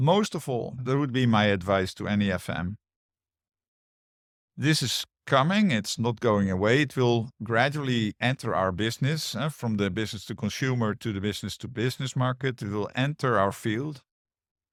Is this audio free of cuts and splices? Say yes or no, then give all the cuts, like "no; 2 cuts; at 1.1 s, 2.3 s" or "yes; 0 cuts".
yes; 0 cuts